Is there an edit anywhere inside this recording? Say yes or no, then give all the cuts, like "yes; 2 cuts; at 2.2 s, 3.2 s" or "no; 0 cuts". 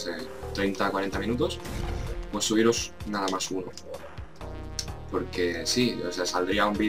no; 0 cuts